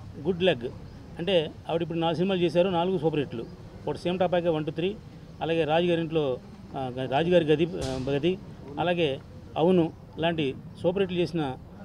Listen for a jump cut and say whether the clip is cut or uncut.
uncut